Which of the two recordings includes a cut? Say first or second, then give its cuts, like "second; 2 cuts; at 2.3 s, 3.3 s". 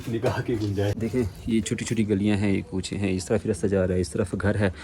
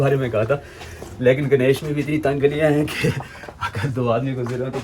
first; 1 cut; at 1.0 s